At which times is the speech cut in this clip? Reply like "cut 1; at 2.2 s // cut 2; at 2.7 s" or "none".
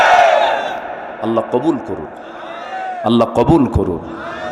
none

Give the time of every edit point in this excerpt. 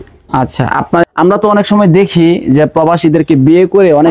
cut 1; at 1.0 s

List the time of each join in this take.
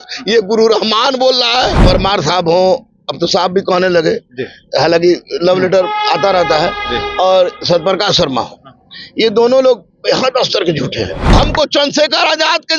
cut 1; at 1.8 s // cut 2; at 11.2 s

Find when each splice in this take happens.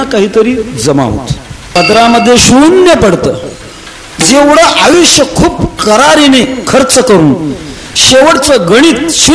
cut 1; at 1.6 s

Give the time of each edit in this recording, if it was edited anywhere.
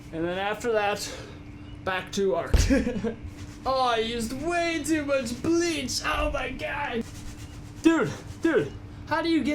none

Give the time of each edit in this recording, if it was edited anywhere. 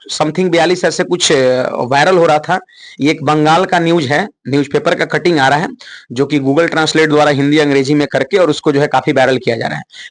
none

